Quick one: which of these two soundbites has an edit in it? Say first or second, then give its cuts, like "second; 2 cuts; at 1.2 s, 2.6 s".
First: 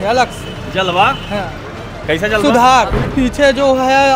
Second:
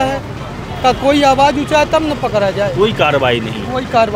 first; 1 cut; at 3.0 s